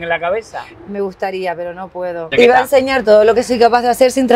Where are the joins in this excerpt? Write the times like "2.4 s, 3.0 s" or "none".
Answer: 2.3 s